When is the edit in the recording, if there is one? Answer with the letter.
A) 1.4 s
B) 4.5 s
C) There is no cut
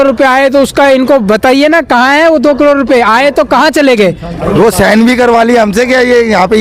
B